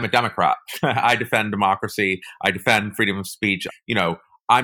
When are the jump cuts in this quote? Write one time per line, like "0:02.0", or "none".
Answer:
0:03.6